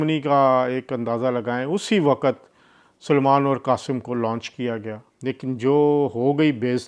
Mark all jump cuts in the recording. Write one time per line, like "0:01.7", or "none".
0:05.1